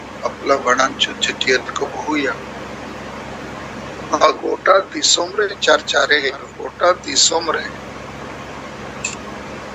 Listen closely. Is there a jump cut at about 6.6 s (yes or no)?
yes